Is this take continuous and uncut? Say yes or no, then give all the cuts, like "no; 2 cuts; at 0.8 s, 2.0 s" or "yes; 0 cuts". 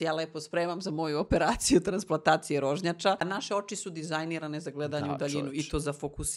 no; 1 cut; at 3.2 s